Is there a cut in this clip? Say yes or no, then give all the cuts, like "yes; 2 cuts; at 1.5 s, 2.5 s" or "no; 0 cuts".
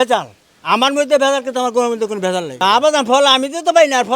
yes; 1 cut; at 2.5 s